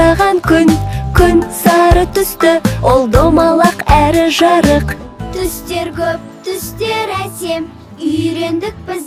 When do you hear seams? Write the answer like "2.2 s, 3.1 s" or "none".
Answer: none